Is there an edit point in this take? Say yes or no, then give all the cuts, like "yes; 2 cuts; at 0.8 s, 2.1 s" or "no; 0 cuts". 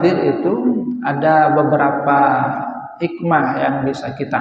no; 0 cuts